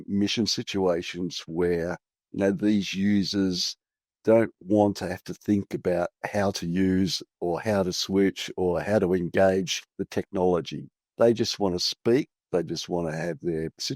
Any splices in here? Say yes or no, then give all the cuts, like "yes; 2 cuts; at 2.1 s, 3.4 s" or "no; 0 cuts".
no; 0 cuts